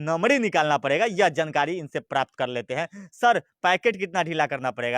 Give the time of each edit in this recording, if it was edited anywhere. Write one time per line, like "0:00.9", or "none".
none

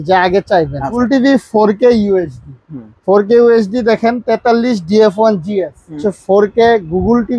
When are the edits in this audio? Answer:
0:01.0
0:06.1

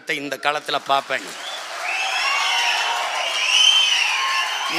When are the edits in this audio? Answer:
none

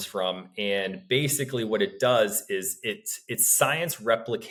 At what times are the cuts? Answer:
none

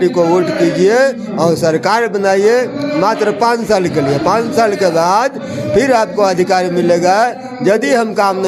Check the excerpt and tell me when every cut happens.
none

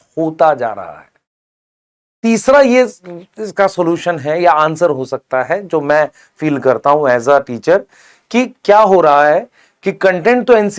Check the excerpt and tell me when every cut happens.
none

